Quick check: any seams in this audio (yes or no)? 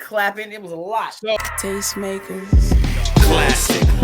yes